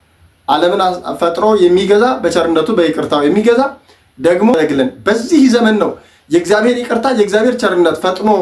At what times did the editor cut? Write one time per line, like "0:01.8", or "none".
0:04.5